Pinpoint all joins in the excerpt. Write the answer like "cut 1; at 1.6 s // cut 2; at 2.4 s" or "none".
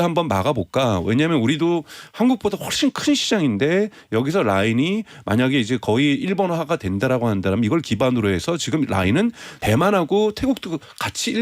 cut 1; at 9.5 s